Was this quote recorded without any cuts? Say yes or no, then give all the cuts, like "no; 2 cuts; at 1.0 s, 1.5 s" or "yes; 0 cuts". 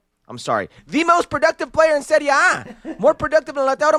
yes; 0 cuts